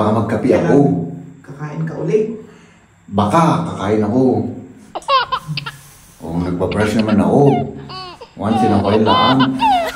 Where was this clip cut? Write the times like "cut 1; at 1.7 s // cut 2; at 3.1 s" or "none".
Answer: cut 1; at 4.8 s // cut 2; at 5.4 s